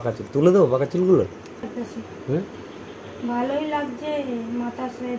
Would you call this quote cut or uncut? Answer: cut